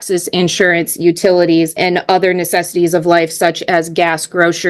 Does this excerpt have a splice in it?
yes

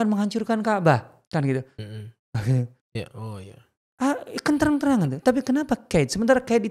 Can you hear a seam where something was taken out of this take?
no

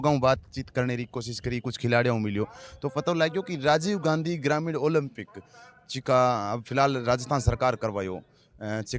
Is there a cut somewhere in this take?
no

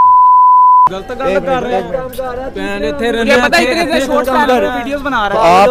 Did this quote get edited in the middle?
no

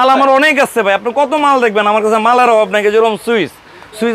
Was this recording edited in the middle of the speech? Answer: no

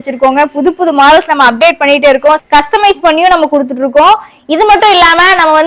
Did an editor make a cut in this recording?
yes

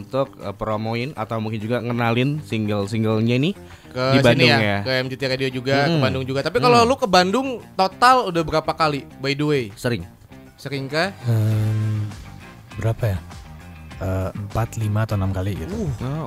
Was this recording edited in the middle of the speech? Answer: no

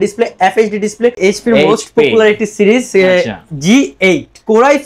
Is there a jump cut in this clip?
yes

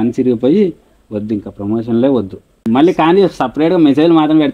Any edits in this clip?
yes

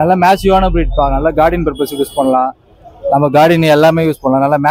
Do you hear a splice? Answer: no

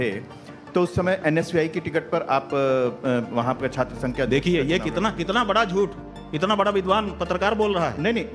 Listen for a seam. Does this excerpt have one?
no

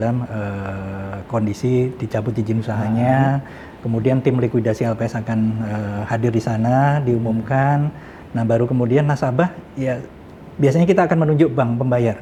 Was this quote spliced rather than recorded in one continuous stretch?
no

